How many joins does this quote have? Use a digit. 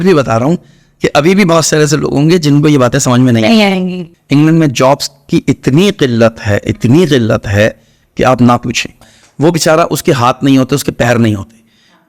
2